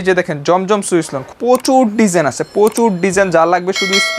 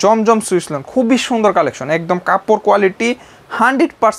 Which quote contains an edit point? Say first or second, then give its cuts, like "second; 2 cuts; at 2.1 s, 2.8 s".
first; 1 cut; at 1.3 s